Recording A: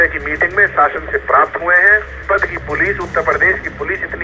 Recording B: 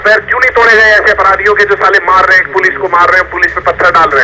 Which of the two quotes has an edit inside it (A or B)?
A